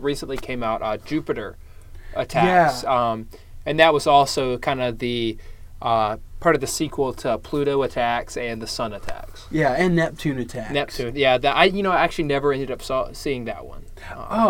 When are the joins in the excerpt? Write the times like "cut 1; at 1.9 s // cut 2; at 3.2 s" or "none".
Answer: none

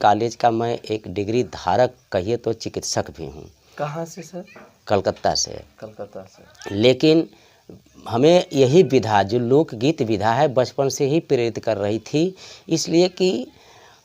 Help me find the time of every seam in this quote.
none

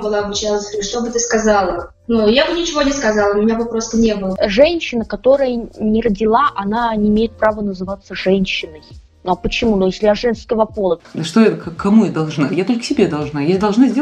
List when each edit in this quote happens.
cut 1; at 4.3 s // cut 2; at 11.1 s

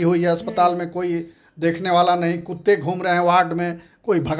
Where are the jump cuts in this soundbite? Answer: none

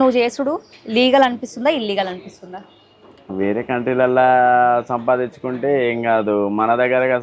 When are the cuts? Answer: none

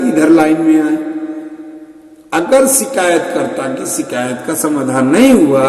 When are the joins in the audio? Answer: none

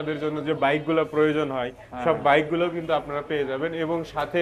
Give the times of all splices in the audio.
none

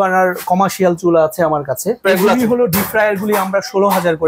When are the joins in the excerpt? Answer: cut 1; at 2.0 s

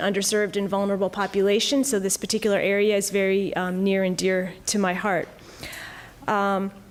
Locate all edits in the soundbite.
none

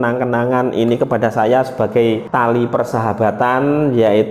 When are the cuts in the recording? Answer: cut 1; at 2.2 s

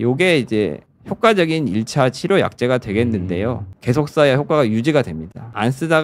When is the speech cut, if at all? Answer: cut 1; at 3.7 s

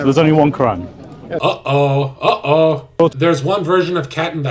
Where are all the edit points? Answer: cut 1; at 3.0 s

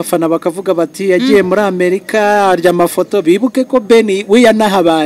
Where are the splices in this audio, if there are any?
none

